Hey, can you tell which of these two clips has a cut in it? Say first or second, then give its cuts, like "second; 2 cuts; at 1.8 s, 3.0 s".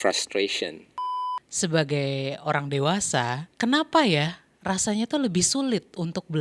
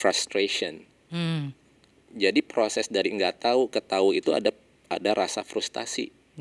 first; 2 cuts; at 1.1 s, 3.4 s